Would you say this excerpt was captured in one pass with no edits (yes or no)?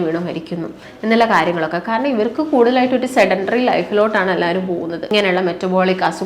no